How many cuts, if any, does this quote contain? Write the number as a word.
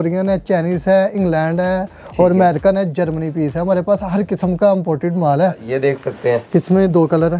one